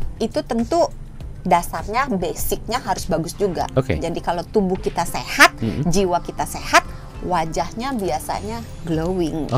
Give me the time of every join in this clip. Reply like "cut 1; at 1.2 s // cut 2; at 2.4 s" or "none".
none